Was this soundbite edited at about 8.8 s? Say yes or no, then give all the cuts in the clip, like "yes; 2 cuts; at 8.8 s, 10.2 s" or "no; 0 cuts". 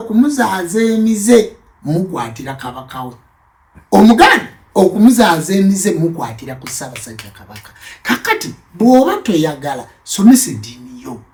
no; 0 cuts